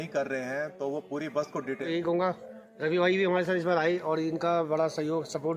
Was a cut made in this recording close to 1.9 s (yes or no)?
yes